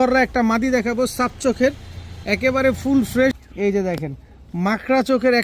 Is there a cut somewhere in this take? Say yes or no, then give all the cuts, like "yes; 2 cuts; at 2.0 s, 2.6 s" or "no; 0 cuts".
yes; 1 cut; at 3.4 s